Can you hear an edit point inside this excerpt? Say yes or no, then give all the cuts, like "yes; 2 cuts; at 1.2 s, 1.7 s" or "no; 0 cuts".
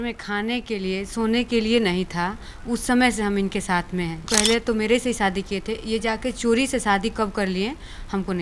yes; 1 cut; at 4.2 s